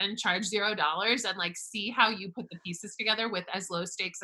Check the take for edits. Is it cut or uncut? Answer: uncut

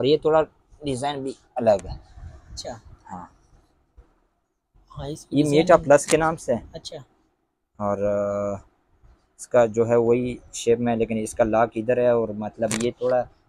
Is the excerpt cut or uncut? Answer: uncut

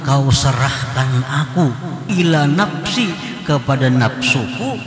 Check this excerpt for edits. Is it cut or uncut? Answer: cut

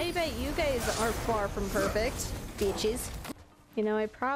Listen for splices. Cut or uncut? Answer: cut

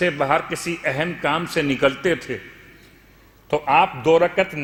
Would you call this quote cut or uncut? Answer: uncut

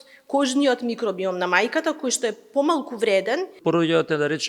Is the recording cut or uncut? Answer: cut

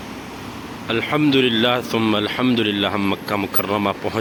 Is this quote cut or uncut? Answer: uncut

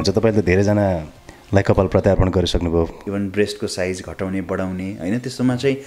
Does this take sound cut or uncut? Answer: cut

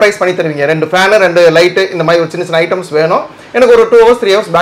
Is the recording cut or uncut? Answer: uncut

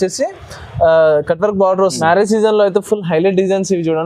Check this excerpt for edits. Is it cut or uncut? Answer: cut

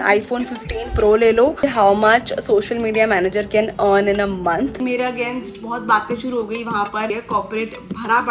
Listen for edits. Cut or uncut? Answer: cut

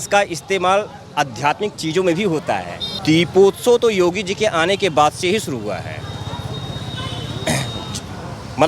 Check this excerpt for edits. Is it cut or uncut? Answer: cut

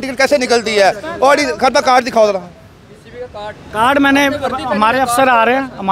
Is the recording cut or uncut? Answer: uncut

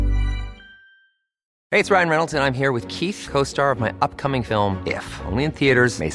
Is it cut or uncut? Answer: cut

